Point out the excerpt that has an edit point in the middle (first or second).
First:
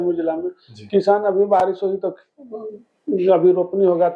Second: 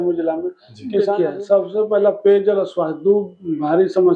second